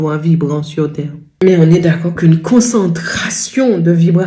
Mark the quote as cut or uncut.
cut